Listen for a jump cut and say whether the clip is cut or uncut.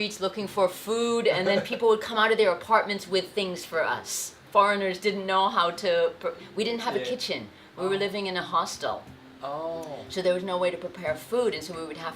cut